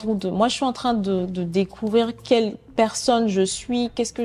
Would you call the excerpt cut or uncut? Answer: uncut